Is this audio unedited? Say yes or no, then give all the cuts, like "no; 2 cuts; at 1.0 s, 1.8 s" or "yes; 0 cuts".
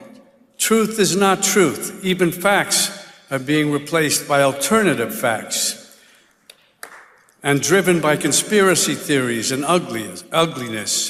yes; 0 cuts